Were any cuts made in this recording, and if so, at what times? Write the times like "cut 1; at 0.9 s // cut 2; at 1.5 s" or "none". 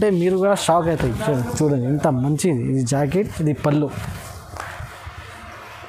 none